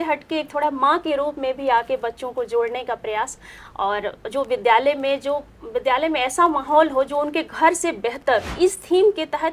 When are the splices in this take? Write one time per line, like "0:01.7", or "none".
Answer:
0:08.5